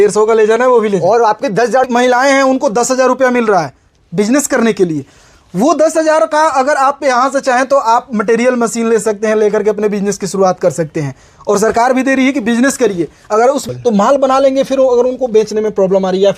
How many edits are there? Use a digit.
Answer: 2